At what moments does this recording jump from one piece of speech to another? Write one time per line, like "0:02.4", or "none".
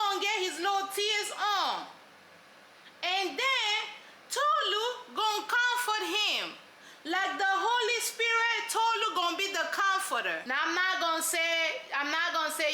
0:10.4